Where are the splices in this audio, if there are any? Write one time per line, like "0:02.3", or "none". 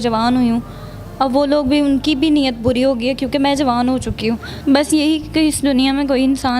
0:04.5